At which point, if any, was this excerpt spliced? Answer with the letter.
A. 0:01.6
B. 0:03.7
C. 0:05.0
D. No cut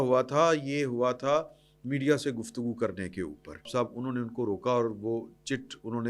B